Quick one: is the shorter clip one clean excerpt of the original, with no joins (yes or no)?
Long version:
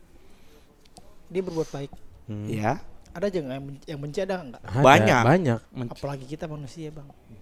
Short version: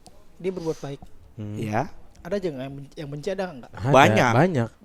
yes